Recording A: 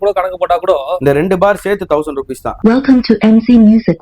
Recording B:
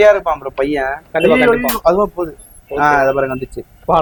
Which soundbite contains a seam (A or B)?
A